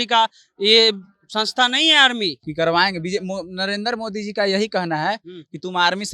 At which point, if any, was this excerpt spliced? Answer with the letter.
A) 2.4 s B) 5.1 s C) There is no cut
A